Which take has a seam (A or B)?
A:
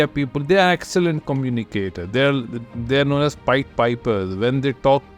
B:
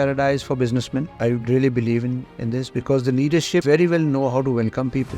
B